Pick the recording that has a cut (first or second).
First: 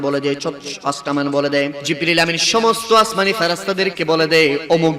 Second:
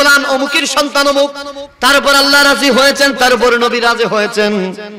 first